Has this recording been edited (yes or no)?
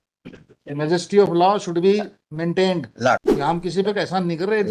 yes